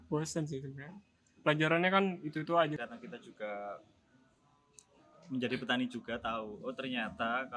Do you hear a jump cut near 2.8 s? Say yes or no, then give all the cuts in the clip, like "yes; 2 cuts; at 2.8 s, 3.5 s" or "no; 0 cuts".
yes; 1 cut; at 2.8 s